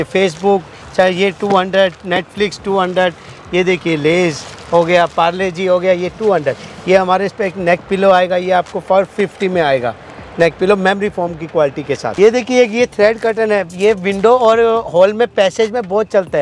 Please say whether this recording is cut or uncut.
uncut